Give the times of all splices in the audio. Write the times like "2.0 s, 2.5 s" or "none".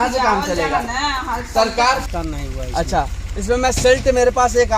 2.0 s